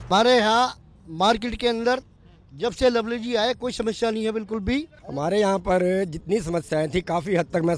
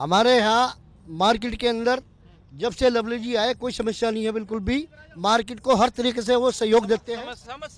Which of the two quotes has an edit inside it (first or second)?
first